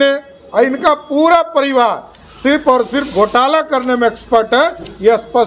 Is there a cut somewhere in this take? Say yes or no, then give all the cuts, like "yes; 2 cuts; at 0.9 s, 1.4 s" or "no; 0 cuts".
no; 0 cuts